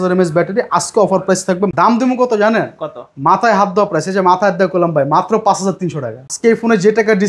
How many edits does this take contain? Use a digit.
2